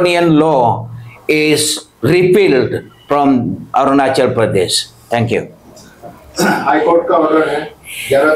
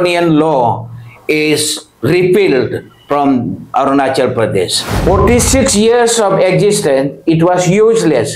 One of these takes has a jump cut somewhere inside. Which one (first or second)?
second